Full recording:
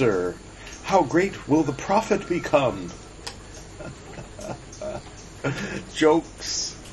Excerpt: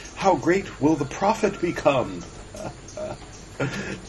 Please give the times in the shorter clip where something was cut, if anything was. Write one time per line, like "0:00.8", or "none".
0:02.4